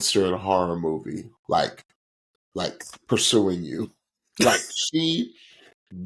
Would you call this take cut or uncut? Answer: uncut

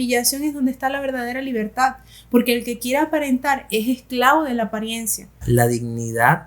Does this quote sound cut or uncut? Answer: cut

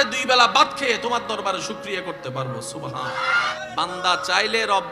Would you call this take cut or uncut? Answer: cut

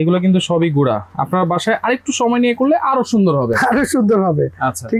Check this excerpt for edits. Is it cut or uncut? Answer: uncut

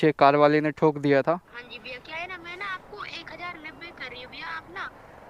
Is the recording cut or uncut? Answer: cut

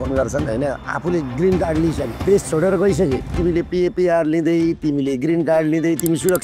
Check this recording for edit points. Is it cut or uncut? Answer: cut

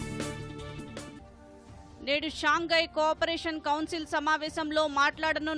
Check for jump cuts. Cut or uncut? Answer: uncut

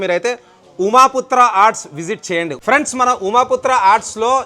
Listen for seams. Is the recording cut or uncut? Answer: cut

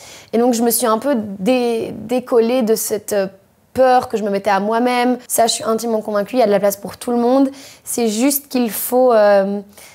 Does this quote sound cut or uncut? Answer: cut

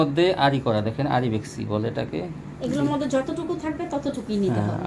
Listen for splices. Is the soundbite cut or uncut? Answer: uncut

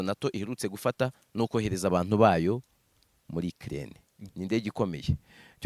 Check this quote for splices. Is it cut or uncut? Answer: cut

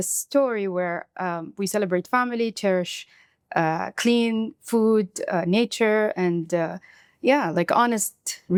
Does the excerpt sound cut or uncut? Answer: uncut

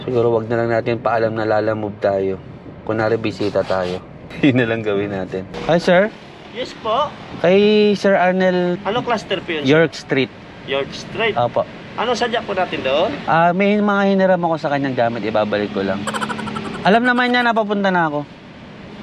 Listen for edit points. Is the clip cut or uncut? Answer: uncut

